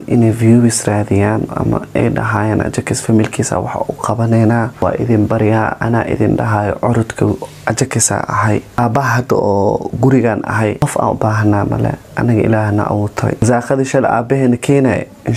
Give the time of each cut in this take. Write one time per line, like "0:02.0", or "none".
0:04.7
0:08.8
0:10.8
0:13.4